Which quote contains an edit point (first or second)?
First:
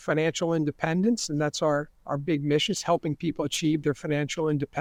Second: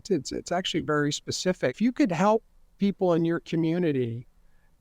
second